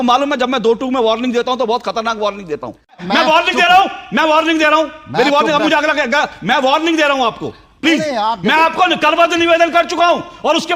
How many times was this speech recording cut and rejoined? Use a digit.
1